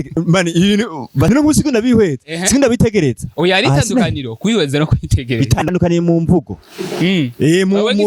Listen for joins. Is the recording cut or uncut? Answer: cut